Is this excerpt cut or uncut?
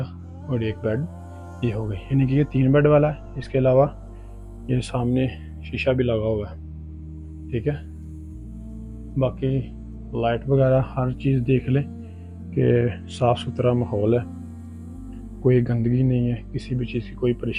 uncut